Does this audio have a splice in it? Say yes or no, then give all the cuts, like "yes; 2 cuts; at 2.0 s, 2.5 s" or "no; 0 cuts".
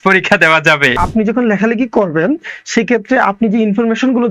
yes; 1 cut; at 1.0 s